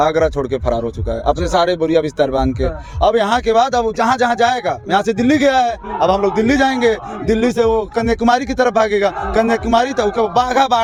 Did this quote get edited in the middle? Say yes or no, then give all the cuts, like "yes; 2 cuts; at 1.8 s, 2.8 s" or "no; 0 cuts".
no; 0 cuts